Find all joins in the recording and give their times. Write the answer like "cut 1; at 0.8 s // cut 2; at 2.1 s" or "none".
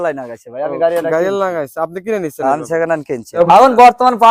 cut 1; at 3.2 s